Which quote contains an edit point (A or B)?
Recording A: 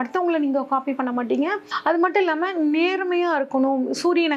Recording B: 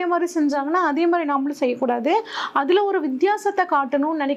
A